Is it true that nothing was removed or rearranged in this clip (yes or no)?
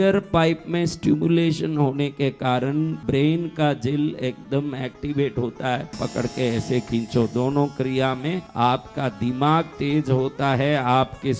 no